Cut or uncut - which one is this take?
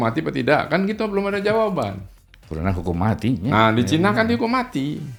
uncut